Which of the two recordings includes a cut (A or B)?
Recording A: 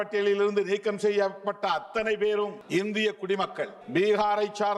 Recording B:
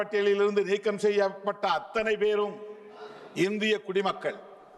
A